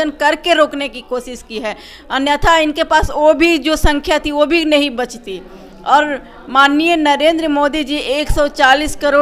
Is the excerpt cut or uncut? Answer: uncut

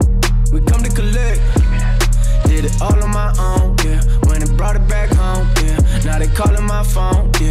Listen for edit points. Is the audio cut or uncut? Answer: uncut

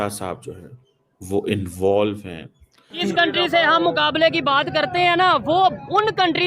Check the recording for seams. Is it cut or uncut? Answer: cut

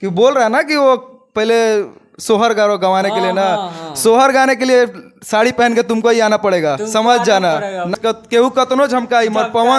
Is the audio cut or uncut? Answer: cut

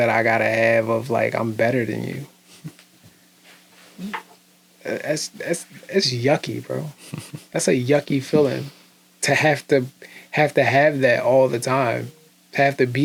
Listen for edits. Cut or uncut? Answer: uncut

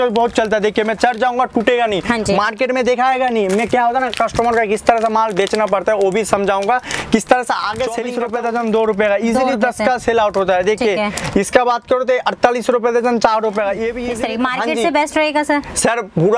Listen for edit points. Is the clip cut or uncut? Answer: cut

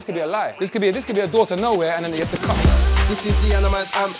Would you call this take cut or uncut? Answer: cut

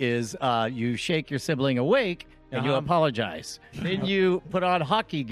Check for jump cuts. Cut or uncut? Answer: cut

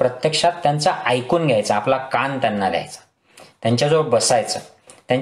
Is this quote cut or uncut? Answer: uncut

